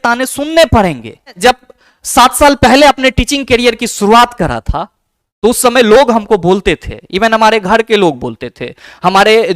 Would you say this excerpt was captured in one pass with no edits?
no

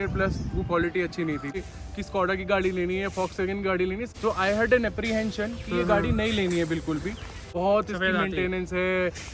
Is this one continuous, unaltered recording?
no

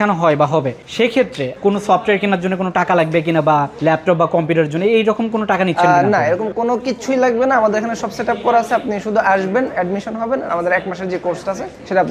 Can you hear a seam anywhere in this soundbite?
no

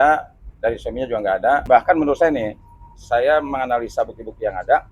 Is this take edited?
yes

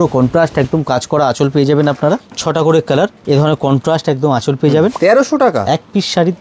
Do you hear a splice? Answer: yes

